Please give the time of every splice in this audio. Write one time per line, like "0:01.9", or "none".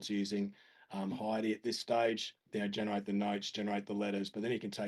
0:02.4